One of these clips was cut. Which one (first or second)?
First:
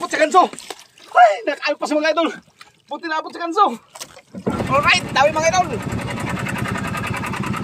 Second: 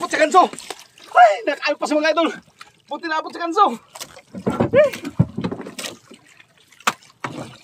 first